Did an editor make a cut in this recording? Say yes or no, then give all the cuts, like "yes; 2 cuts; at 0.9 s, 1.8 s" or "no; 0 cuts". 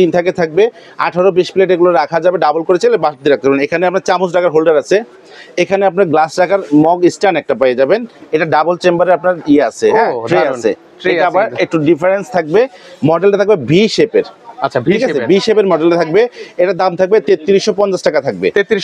no; 0 cuts